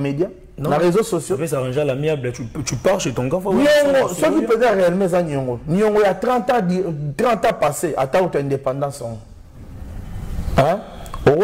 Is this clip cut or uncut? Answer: uncut